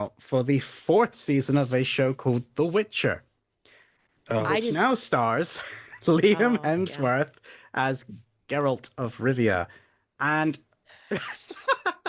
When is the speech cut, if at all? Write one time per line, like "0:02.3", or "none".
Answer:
none